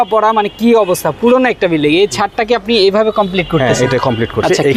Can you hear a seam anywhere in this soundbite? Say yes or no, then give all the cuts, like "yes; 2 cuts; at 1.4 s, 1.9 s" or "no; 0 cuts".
no; 0 cuts